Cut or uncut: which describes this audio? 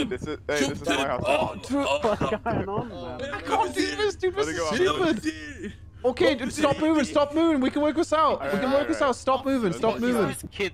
uncut